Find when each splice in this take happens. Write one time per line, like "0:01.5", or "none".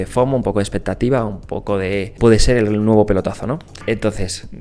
0:02.1
0:03.7